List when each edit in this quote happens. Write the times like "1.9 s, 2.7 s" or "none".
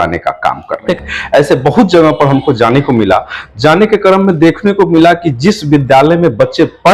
1.0 s